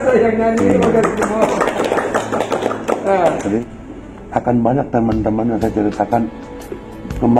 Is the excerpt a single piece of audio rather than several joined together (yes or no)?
no